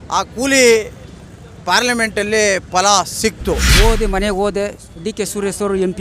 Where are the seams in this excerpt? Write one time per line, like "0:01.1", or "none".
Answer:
0:03.6